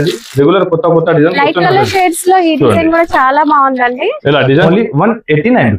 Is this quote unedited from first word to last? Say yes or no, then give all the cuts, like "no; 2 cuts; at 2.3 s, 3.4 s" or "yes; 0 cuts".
no; 1 cut; at 4.6 s